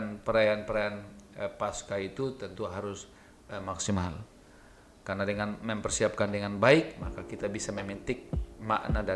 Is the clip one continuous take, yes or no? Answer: yes